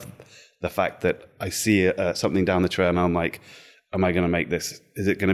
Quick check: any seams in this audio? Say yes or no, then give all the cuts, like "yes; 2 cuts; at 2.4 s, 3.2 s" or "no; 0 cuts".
no; 0 cuts